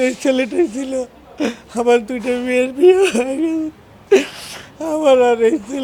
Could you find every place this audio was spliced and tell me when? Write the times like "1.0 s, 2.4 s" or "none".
none